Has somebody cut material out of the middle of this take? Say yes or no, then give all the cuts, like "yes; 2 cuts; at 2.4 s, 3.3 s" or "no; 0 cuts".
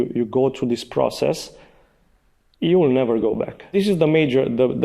yes; 1 cut; at 3.6 s